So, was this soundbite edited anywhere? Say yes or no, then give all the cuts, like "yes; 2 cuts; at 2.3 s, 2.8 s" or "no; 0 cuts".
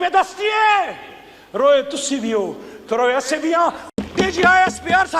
yes; 1 cut; at 3.8 s